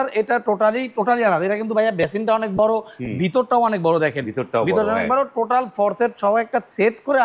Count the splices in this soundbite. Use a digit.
0